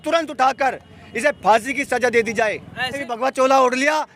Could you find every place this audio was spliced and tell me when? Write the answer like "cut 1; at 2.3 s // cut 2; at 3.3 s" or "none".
cut 1; at 3.0 s